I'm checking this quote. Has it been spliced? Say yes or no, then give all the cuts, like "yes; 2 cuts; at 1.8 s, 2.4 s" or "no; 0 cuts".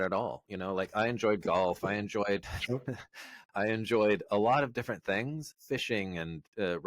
yes; 1 cut; at 5.5 s